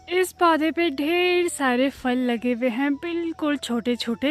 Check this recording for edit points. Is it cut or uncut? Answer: uncut